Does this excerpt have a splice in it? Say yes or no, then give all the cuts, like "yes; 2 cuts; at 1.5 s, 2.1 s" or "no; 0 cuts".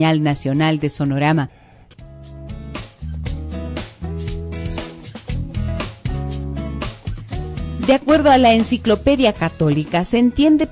no; 0 cuts